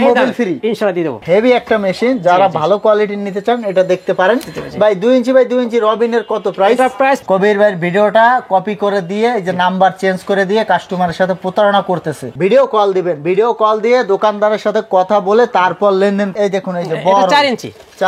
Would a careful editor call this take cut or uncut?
cut